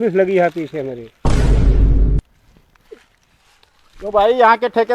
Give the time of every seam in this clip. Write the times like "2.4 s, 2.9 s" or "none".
1.1 s, 2.4 s